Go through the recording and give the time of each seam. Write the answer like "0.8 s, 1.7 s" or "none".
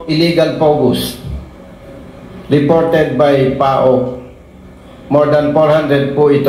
none